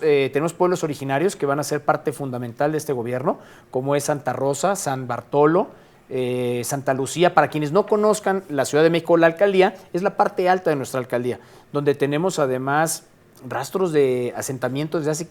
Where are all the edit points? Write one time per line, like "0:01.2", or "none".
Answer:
none